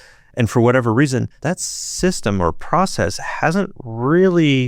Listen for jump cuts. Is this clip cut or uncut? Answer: cut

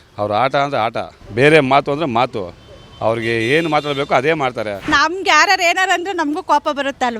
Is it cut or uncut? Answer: cut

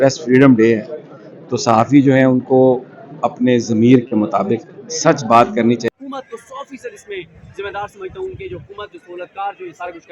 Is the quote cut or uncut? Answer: cut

